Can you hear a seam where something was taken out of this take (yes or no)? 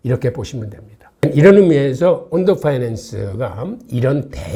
no